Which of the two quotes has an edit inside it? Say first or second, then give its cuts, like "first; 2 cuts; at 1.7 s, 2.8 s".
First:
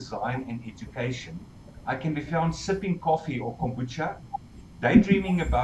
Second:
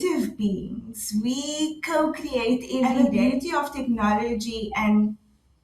second; 1 cut; at 3.1 s